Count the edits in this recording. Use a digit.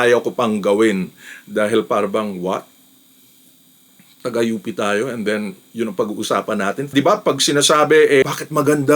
1